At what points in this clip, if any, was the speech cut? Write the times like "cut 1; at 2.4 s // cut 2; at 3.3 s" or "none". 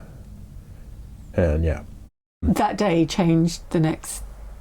cut 1; at 2.4 s